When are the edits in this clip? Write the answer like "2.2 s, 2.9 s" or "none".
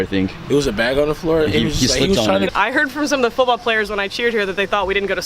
2.5 s